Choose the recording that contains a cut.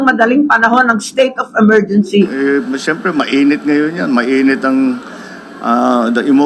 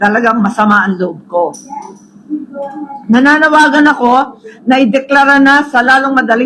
first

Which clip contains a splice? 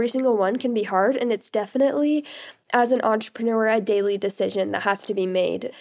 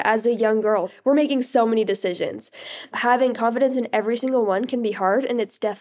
second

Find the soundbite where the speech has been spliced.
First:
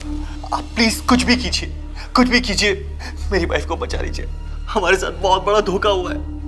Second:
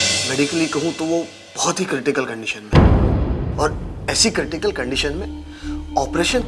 second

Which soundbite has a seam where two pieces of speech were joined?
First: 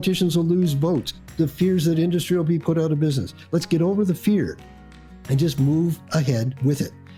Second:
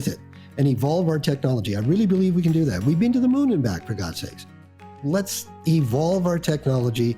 second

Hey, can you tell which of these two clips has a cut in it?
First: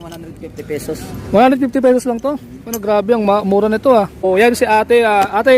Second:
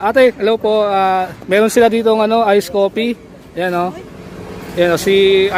first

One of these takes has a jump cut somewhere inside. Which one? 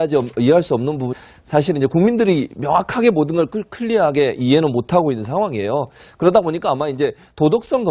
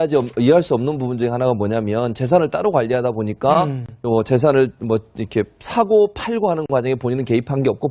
second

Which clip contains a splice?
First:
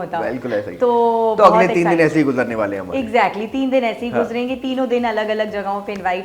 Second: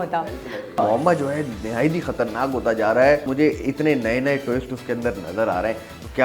second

